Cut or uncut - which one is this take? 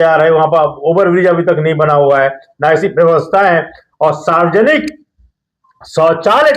uncut